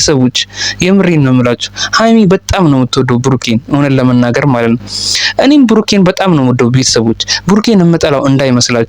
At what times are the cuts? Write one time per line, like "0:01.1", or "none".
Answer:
none